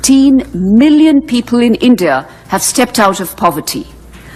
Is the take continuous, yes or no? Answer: yes